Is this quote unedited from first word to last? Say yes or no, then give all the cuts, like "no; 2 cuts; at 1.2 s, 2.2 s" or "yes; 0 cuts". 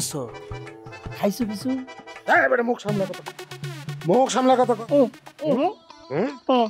no; 1 cut; at 5.6 s